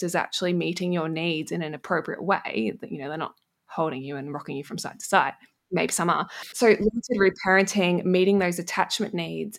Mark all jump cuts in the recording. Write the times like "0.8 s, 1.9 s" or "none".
6.5 s